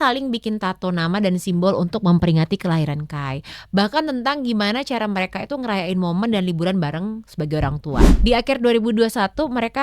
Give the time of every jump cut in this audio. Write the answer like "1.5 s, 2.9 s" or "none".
8.1 s